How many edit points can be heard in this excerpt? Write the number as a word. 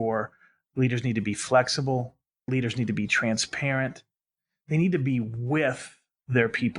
one